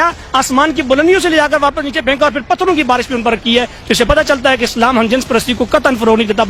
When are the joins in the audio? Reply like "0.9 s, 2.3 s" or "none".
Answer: none